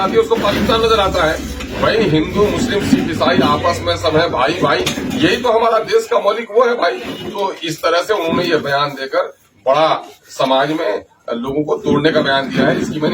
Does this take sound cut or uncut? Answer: uncut